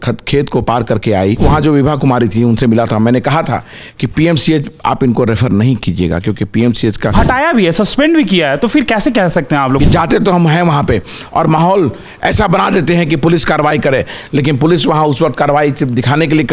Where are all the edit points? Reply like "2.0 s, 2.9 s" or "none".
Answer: 1.4 s, 7.1 s, 9.8 s